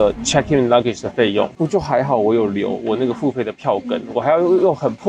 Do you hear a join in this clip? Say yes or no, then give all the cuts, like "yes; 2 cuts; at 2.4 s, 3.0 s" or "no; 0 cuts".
no; 0 cuts